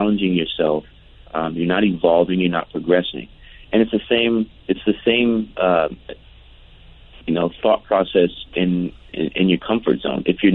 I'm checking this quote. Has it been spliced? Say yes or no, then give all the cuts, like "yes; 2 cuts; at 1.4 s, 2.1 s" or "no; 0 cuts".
no; 0 cuts